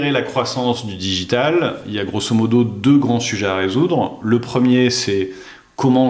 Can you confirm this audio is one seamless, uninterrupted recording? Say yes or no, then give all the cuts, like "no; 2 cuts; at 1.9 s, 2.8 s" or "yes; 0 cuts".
yes; 0 cuts